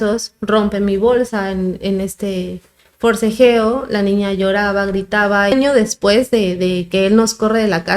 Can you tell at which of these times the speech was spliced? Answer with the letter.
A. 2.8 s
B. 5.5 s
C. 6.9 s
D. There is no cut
B